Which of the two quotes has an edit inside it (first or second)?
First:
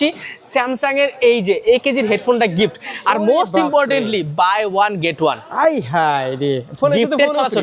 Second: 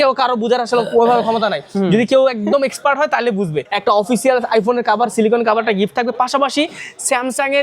second